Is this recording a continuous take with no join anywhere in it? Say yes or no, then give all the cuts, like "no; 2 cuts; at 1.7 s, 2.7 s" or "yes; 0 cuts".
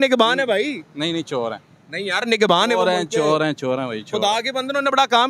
yes; 0 cuts